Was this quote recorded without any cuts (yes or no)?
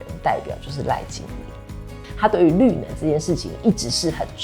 no